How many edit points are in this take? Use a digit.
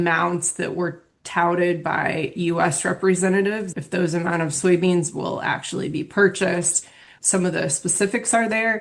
2